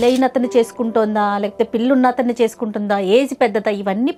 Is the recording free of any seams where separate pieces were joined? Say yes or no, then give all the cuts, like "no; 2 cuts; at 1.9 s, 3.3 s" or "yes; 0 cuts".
yes; 0 cuts